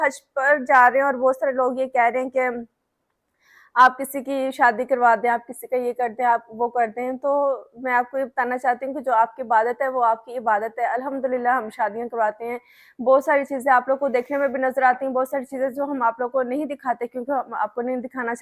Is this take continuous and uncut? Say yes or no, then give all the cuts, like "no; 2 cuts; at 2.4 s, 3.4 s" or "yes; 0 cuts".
yes; 0 cuts